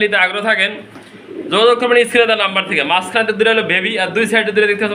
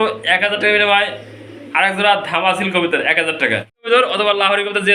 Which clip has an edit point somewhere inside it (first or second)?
second